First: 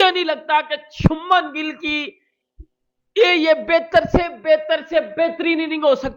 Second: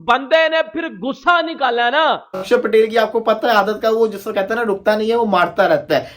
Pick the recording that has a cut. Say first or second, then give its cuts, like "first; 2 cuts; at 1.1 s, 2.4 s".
second; 1 cut; at 2.5 s